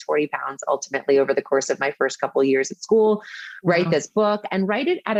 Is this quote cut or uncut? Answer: uncut